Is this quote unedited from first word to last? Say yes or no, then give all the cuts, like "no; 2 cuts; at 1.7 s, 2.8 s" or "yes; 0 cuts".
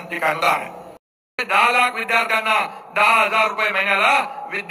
no; 1 cut; at 1.4 s